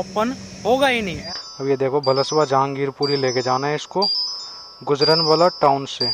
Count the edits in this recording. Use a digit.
1